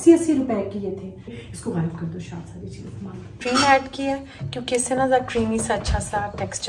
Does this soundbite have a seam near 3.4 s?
yes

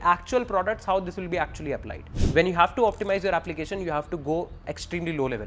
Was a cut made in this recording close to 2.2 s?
yes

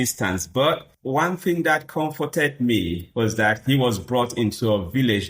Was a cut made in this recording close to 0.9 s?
yes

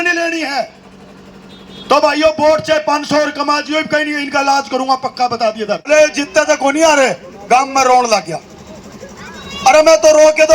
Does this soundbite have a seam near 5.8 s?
yes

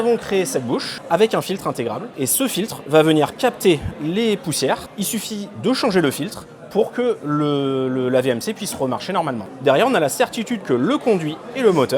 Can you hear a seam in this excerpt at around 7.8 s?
no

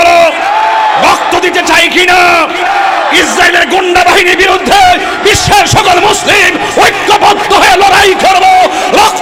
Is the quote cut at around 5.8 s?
no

